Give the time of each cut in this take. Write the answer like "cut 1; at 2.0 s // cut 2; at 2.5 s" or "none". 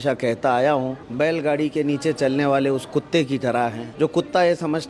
cut 1; at 1.0 s // cut 2; at 3.8 s